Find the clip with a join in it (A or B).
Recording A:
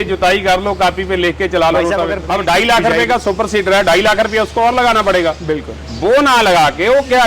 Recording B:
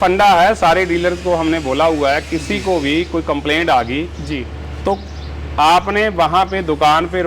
A